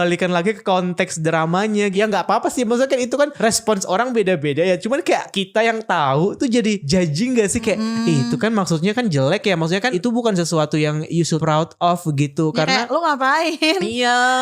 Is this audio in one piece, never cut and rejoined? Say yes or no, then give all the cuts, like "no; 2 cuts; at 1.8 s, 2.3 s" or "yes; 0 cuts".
no; 7 cuts; at 1.9 s, 3.3 s, 5.4 s, 6.8 s, 9.9 s, 11.4 s, 12.9 s